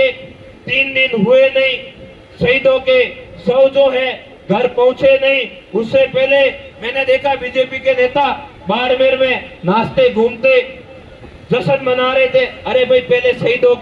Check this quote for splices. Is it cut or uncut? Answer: uncut